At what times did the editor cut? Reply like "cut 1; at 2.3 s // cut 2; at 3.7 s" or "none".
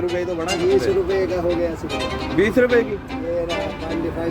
none